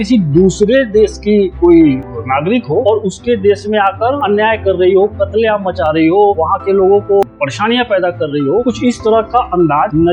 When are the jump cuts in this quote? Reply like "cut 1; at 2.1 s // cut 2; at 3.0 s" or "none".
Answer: cut 1; at 2.1 s // cut 2; at 7.2 s